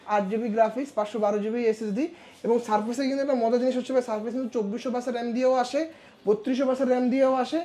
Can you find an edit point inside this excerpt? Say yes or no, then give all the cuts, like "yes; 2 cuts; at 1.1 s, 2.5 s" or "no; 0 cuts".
no; 0 cuts